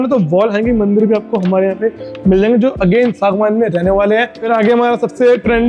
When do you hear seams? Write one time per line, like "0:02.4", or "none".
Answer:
0:04.4